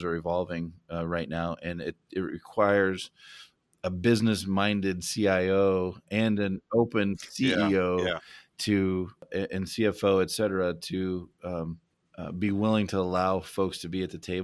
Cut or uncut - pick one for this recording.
uncut